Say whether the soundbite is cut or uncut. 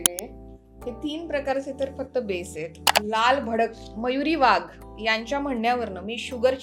cut